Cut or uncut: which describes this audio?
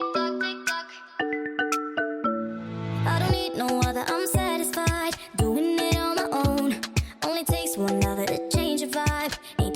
cut